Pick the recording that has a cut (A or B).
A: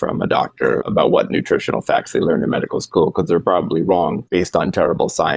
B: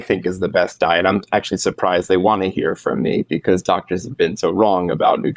A